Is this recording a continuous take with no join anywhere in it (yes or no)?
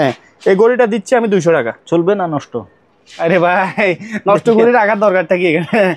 yes